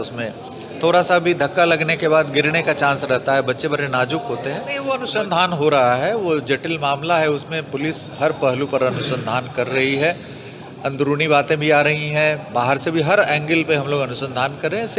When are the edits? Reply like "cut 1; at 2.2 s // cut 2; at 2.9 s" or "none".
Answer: cut 1; at 4.8 s